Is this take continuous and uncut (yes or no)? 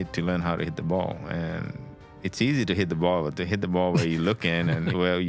yes